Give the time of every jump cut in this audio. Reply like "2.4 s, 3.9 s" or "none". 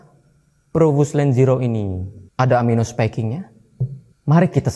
none